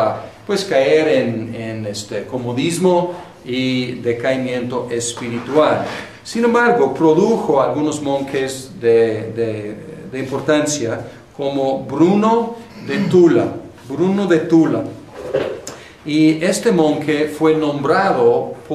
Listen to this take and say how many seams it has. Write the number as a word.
one